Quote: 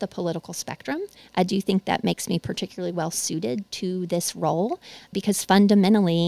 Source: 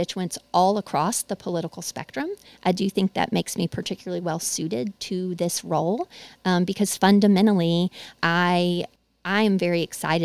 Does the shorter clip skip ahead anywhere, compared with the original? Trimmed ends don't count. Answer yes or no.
yes